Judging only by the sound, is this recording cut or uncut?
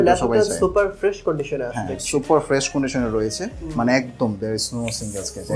uncut